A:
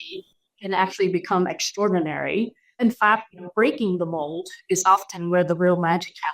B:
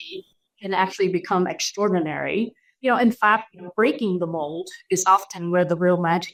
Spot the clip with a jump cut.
A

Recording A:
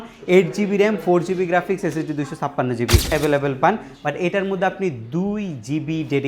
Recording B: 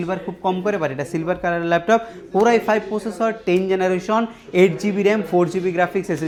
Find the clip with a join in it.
A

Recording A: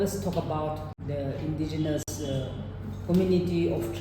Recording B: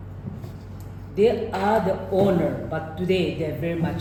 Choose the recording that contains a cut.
A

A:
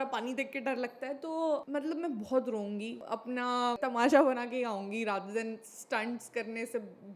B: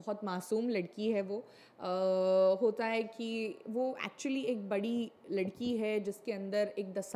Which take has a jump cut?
A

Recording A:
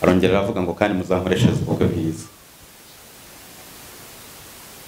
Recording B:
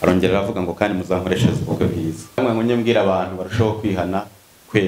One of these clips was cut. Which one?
B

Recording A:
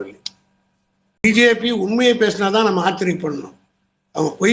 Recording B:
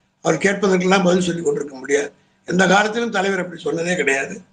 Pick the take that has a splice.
A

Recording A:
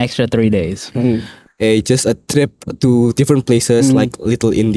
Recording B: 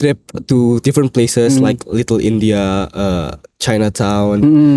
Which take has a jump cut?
A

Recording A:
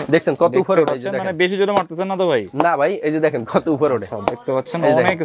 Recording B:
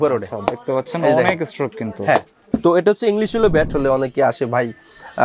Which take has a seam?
B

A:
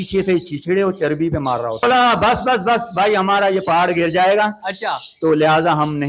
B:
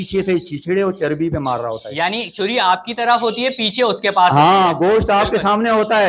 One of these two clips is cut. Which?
A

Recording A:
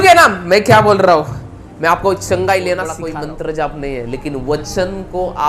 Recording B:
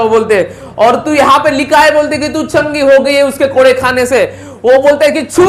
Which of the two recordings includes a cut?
A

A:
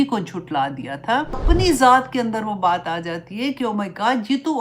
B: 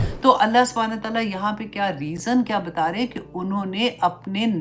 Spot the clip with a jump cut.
A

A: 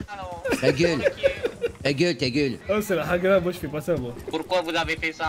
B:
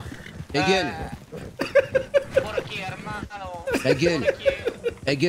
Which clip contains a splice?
A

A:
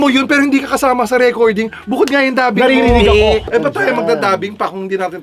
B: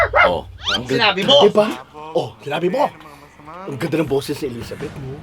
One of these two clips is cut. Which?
A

